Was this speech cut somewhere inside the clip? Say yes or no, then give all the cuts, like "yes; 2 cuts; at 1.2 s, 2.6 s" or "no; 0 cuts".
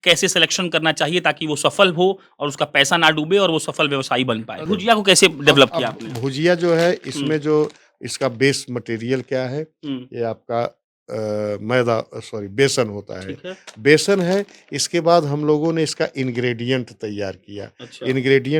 yes; 1 cut; at 4.6 s